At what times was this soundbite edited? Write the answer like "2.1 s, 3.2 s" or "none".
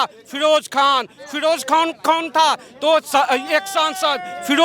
none